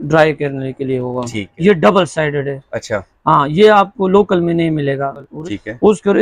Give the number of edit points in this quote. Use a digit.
2